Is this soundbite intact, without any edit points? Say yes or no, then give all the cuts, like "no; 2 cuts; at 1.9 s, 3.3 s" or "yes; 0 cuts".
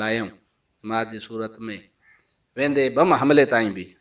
yes; 0 cuts